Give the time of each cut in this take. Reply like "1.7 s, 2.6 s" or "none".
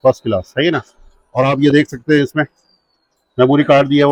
none